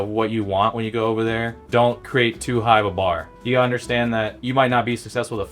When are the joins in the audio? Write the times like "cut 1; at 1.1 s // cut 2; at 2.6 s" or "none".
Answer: cut 1; at 1.9 s // cut 2; at 3.3 s // cut 3; at 4.4 s